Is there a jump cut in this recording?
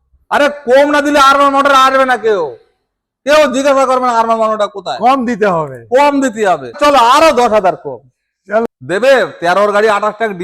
yes; 2 cuts; at 6.8 s, 8.6 s

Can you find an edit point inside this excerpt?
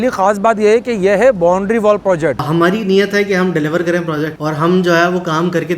yes; 2 cuts; at 2.4 s, 4.4 s

